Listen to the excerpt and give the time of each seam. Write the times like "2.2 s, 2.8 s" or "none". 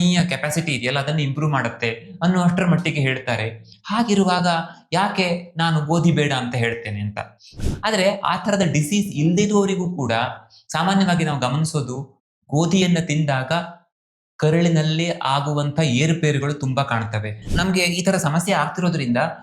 7.6 s, 17.4 s